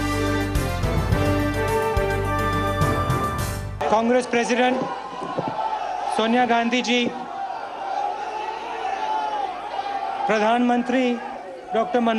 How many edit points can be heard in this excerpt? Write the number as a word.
one